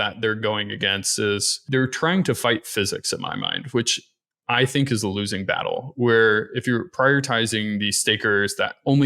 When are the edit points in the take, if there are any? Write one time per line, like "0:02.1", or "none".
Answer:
0:01.5